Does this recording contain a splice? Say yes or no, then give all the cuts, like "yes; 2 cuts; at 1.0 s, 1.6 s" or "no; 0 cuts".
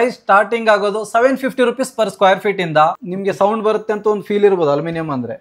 yes; 1 cut; at 3.1 s